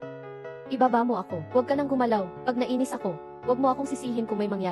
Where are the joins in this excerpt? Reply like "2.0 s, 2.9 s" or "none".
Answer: none